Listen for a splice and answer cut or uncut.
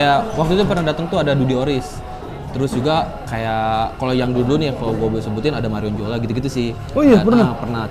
uncut